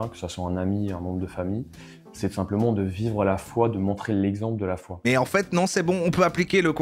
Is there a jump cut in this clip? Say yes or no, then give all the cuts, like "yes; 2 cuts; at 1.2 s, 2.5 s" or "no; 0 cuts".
yes; 1 cut; at 5.0 s